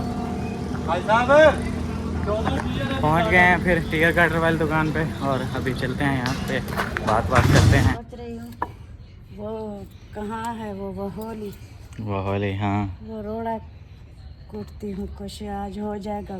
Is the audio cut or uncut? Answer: cut